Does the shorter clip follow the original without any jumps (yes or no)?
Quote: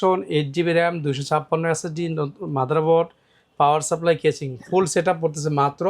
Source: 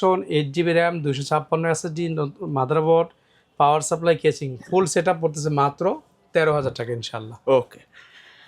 yes